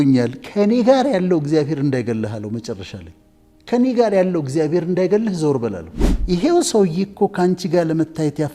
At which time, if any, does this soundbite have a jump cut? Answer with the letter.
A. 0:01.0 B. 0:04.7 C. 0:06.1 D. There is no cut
C